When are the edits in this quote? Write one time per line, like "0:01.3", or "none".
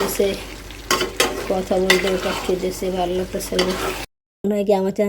0:04.2